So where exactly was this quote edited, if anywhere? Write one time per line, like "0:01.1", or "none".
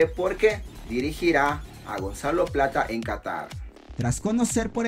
none

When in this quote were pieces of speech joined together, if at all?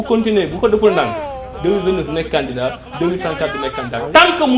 none

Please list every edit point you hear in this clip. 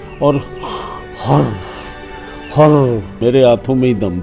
0:03.1

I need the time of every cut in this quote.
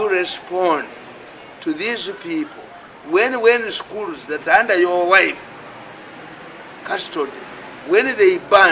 none

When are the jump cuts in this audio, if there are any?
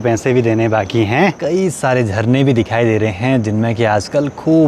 0:01.4

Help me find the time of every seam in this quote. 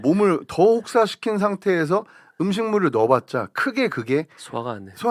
none

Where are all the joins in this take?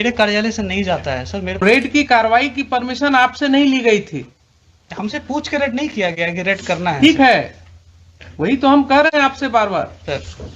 0:01.6

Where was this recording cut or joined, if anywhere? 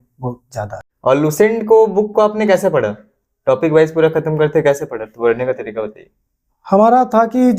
none

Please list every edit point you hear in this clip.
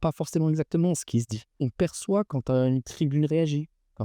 0:01.4

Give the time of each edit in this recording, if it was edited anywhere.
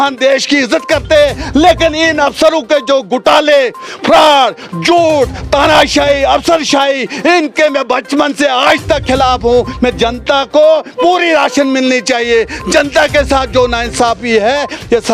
none

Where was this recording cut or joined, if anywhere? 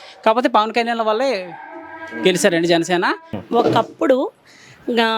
0:03.3

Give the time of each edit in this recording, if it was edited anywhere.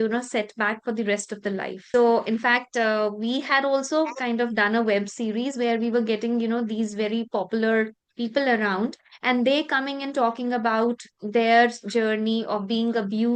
0:01.8

